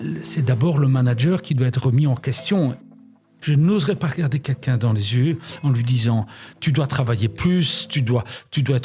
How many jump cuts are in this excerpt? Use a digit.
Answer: 1